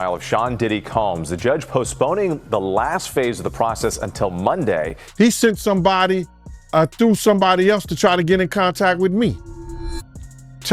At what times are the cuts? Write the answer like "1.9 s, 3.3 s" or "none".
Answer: 5.0 s